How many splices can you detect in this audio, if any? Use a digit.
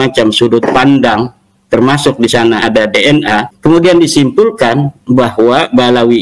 1